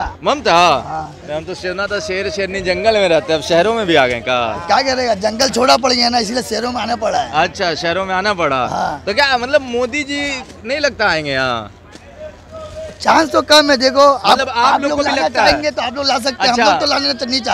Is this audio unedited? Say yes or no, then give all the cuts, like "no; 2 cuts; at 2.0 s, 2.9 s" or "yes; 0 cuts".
yes; 0 cuts